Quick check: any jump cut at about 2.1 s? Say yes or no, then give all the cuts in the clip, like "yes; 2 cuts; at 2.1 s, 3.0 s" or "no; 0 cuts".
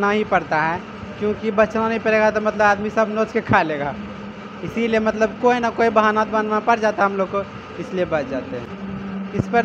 no; 1 cut; at 8.7 s